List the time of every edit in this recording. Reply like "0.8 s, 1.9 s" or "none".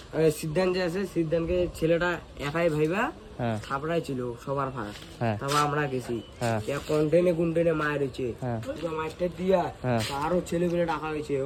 none